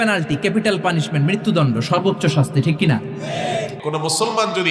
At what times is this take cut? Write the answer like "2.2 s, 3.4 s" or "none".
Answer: 3.8 s

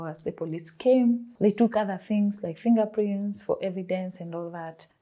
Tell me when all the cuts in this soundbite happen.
none

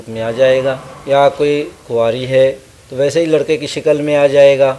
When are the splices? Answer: 0.9 s

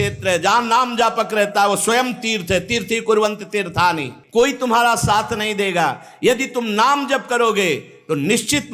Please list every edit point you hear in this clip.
4.1 s

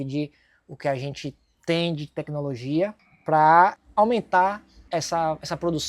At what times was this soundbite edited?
3.1 s, 3.8 s, 4.7 s

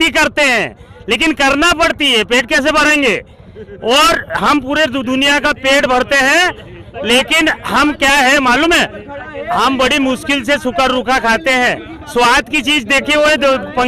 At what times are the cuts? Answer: none

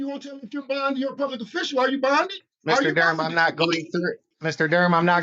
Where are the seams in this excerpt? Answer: 2.5 s, 4.3 s

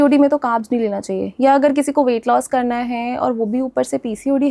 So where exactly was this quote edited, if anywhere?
none

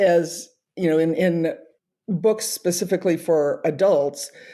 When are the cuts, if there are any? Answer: none

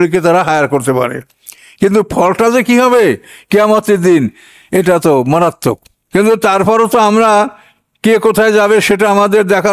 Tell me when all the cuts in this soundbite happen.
5.9 s

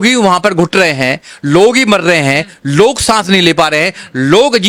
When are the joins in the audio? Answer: none

